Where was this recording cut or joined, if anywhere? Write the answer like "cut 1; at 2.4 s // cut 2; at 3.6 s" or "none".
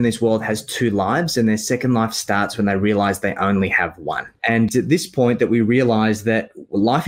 cut 1; at 4.6 s

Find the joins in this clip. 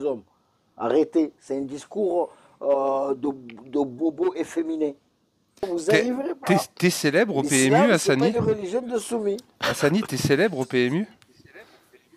cut 1; at 5.6 s

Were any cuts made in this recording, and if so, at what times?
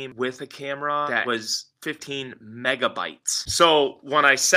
cut 1; at 1.1 s // cut 2; at 3.4 s

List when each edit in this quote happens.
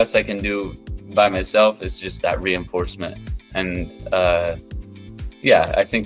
none

